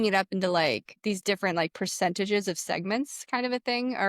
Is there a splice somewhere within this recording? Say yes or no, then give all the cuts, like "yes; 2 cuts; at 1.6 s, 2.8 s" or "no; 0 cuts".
yes; 1 cut; at 0.9 s